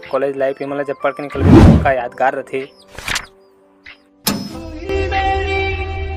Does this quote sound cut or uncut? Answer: uncut